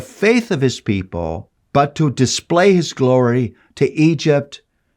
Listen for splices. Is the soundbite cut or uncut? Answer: cut